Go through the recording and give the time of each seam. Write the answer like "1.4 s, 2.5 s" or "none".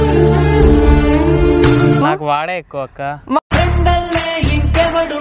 2.0 s